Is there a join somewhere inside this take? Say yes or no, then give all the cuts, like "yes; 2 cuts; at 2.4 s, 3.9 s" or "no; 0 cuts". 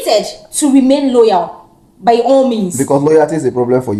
no; 0 cuts